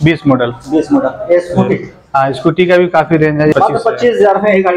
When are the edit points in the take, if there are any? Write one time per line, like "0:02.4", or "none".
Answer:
0:03.5

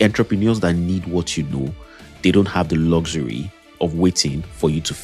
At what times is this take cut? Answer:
0:03.7

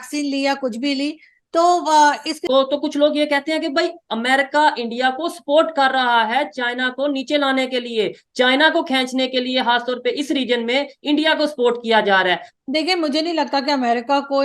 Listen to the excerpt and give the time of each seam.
0:02.4
0:12.5

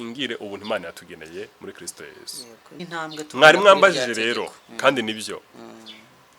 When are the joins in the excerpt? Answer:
0:02.8

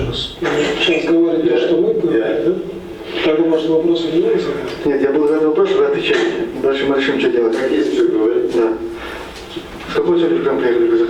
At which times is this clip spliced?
none

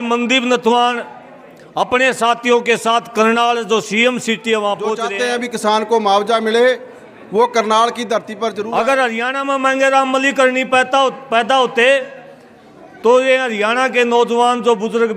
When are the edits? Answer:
0:05.1
0:08.6

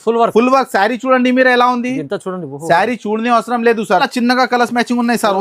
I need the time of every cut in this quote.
0:04.1

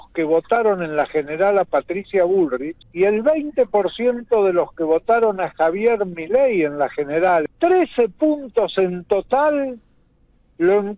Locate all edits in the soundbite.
0:02.8
0:07.5

